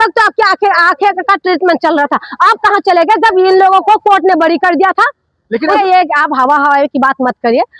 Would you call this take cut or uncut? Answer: cut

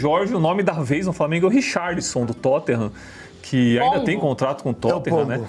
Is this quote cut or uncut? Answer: uncut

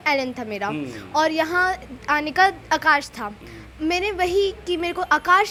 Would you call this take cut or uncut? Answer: uncut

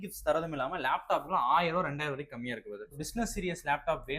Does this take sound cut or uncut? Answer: cut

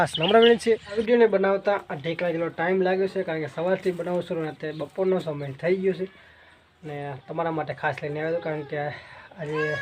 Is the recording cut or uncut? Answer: cut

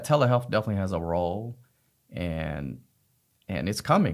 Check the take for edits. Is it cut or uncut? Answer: uncut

